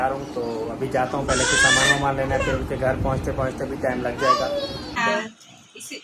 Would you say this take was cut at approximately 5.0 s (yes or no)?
yes